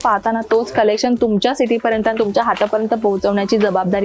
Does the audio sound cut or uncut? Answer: uncut